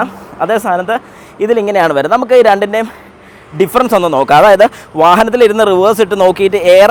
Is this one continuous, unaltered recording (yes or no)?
yes